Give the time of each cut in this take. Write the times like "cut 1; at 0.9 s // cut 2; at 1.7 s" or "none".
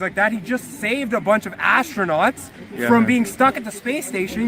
none